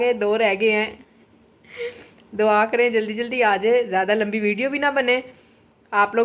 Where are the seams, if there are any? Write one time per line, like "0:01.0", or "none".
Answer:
none